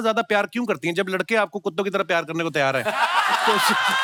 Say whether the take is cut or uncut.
uncut